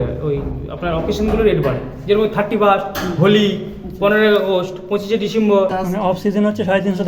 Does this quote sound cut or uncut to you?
cut